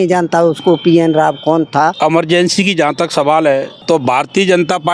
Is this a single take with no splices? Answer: no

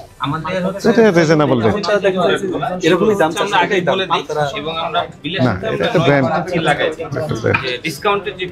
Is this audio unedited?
yes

